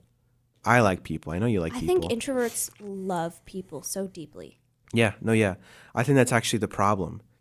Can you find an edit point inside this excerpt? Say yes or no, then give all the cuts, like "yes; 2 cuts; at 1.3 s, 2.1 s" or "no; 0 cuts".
no; 0 cuts